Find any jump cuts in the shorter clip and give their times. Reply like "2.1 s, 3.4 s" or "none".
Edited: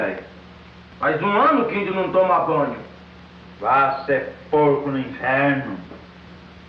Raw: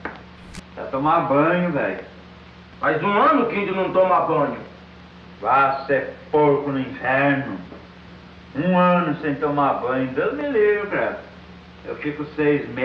none